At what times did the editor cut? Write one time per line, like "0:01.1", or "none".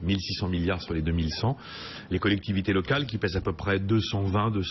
none